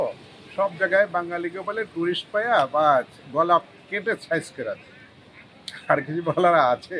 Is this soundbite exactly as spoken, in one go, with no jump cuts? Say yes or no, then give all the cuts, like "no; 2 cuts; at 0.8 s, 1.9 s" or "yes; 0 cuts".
yes; 0 cuts